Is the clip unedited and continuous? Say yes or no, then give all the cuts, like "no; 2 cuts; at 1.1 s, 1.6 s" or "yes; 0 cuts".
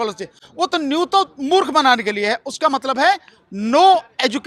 yes; 0 cuts